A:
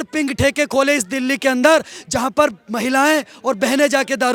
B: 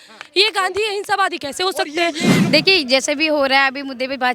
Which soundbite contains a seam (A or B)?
B